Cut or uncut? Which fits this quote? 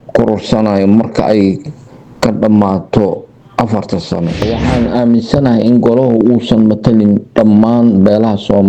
cut